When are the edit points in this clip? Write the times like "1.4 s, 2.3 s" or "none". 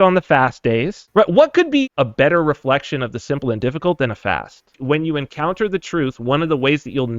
1.0 s, 1.9 s, 4.7 s